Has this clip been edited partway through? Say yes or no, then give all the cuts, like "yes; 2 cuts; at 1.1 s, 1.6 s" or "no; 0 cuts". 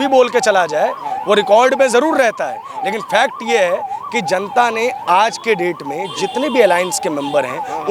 no; 0 cuts